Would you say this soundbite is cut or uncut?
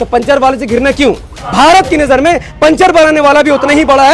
cut